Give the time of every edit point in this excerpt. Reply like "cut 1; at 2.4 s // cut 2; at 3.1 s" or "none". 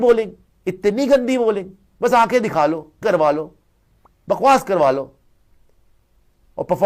none